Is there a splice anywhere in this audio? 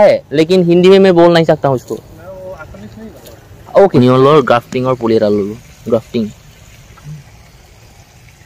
yes; 1 cut; at 4.0 s

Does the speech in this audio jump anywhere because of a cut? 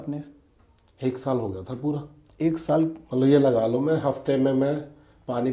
no; 0 cuts

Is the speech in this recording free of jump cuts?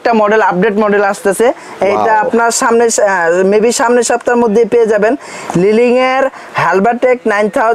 yes; 0 cuts

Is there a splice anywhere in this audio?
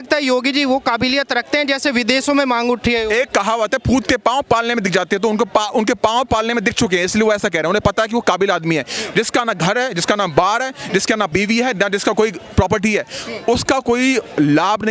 yes; 1 cut; at 11.3 s

